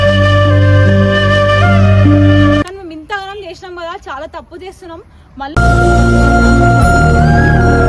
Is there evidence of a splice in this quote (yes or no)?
yes